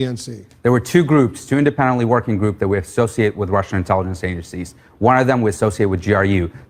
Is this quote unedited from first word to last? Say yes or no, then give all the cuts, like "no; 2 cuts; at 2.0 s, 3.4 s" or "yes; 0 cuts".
yes; 0 cuts